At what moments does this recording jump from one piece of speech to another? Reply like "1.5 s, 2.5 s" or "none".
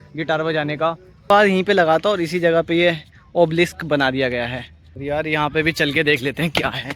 1.1 s, 4.9 s